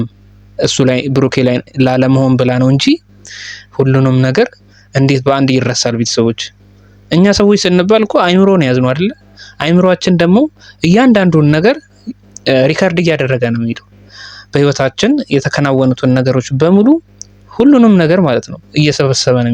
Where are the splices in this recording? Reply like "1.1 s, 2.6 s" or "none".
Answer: none